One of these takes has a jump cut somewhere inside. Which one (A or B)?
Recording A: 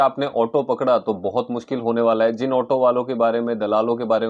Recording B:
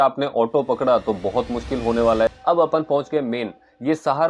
B